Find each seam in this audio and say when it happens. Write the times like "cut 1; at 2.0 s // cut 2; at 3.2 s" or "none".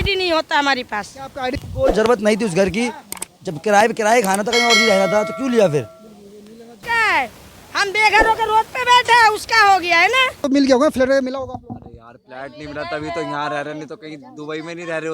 cut 1; at 1.5 s // cut 2; at 6.8 s // cut 3; at 10.4 s

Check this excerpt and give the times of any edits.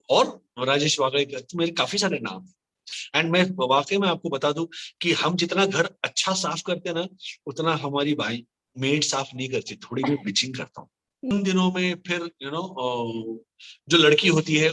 cut 1; at 3.0 s // cut 2; at 11.3 s

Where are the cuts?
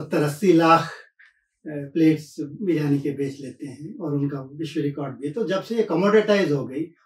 none

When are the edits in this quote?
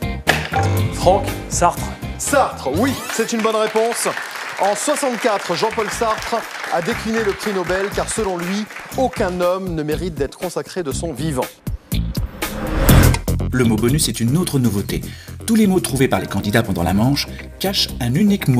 cut 1; at 5.0 s

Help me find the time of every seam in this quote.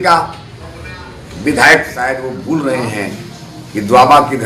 cut 1; at 2.2 s

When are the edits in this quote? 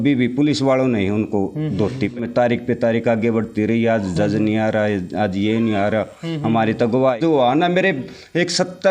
cut 1; at 2.2 s // cut 2; at 7.2 s

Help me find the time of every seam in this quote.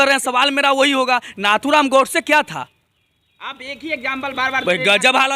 none

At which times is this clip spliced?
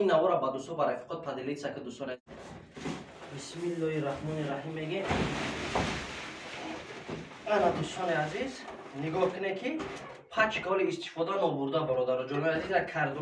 cut 1; at 2.2 s

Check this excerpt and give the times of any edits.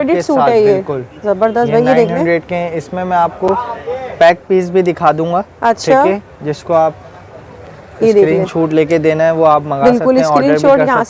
none

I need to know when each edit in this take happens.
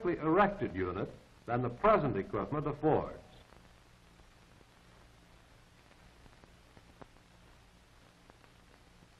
none

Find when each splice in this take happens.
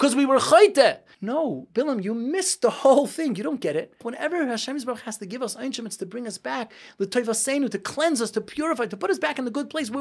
cut 1; at 1.1 s // cut 2; at 4.1 s

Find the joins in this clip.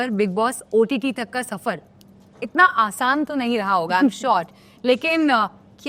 none

